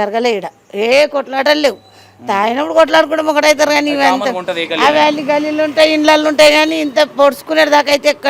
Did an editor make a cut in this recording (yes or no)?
no